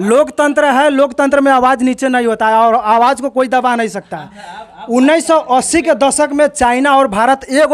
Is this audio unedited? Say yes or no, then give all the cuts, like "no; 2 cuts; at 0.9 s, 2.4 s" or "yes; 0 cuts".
yes; 0 cuts